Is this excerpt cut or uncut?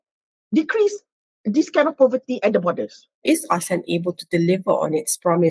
cut